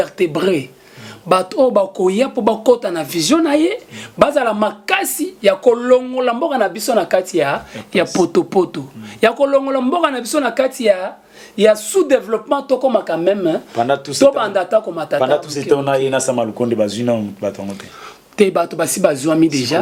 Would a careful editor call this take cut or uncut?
uncut